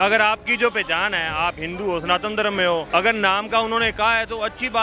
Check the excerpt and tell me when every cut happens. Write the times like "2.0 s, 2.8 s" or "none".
2.9 s